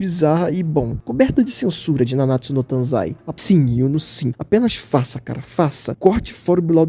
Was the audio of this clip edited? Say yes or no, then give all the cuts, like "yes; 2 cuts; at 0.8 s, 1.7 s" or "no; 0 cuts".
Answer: yes; 1 cut; at 3.3 s